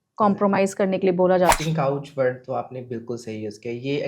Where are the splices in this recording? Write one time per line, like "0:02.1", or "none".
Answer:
0:01.6